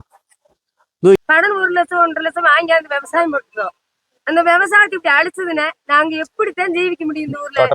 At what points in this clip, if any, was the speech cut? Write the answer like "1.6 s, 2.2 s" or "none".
1.2 s

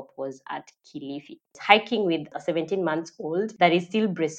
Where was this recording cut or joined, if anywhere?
1.5 s, 2.3 s, 3.5 s

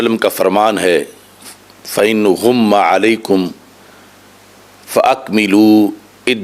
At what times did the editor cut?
none

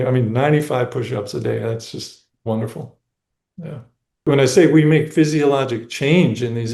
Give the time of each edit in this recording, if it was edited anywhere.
4.2 s

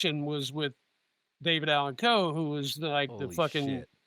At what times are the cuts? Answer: none

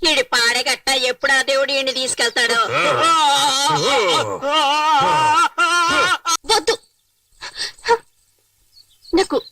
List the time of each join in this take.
6.3 s

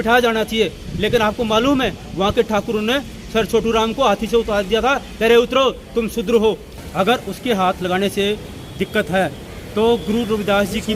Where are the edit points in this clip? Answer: 6.8 s

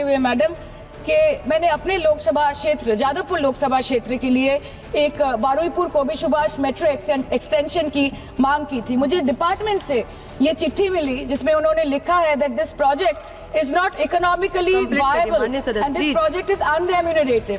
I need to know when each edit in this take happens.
none

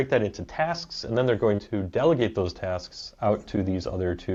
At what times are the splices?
none

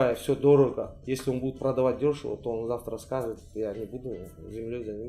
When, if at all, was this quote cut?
none

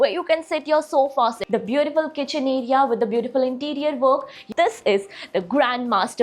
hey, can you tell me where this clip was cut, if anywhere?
1.4 s, 4.4 s

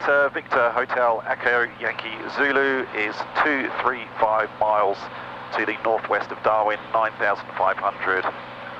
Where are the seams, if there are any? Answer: none

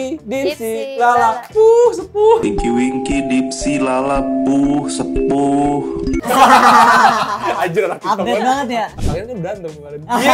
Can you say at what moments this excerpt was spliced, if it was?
9.0 s

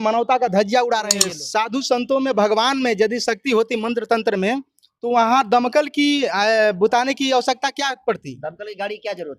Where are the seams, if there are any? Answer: 1.3 s

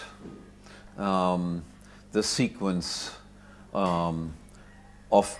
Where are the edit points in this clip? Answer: 3.8 s

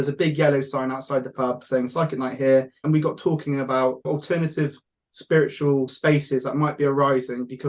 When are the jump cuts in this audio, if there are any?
2.7 s, 4.0 s, 5.9 s

